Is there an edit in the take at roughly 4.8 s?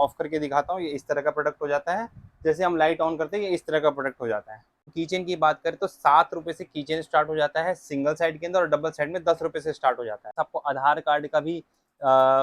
yes; 2 cuts; at 4.8 s, 10.3 s

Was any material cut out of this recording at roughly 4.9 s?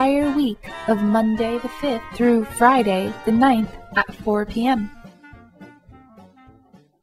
yes; 1 cut; at 4.9 s

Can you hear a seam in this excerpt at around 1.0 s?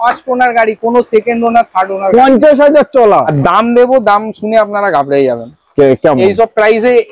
no; 1 cut; at 3.3 s

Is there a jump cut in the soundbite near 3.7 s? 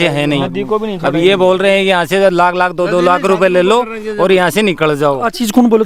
no; 0 cuts

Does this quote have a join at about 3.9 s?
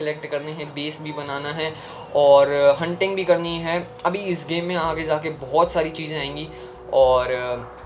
no; 0 cuts

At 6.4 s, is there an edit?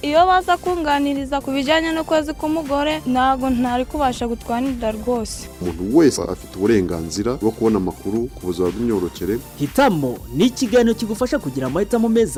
no; 0 cuts

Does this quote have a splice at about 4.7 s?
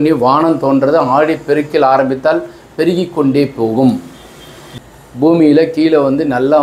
yes; 1 cut; at 4.7 s

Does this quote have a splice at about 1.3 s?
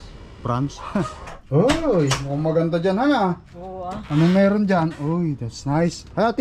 yes; 1 cut; at 1.3 s

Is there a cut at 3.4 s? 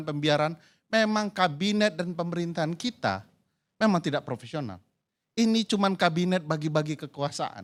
no; 0 cuts

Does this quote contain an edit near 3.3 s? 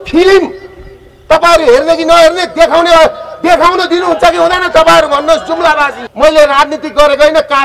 no; 1 cut; at 6.0 s

